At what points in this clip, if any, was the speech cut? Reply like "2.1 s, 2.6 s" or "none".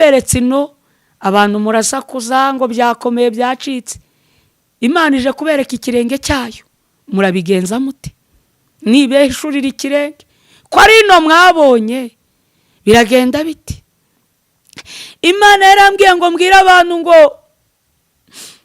none